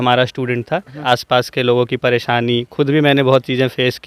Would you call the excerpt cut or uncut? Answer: cut